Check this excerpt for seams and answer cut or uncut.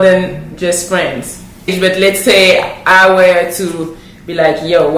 cut